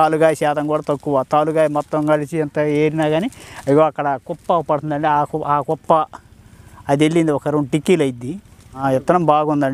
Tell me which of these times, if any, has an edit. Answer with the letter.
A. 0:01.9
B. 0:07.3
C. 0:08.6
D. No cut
C